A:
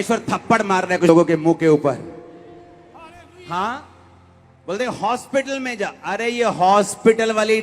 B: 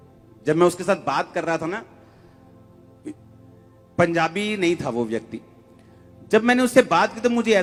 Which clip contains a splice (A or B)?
A